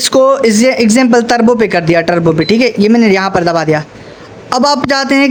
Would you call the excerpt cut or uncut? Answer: uncut